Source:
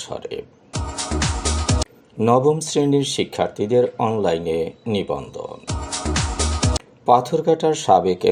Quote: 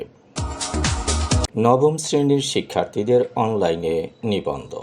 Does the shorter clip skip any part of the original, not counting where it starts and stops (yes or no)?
yes